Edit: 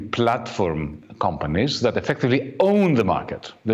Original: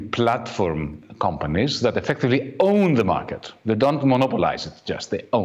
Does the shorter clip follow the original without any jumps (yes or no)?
yes